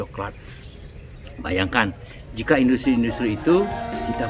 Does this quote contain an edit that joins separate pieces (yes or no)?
no